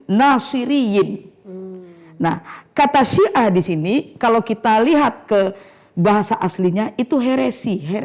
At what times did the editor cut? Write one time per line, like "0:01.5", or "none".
none